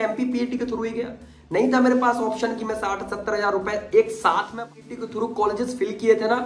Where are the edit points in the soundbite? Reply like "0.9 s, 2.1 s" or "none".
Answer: 4.7 s